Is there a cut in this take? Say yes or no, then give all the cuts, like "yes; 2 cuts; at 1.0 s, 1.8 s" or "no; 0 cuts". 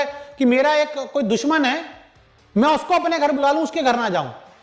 no; 0 cuts